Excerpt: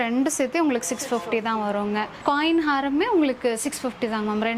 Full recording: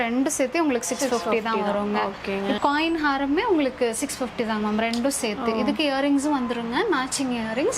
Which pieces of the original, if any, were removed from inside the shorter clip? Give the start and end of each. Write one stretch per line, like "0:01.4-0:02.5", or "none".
0:02.2-0:02.6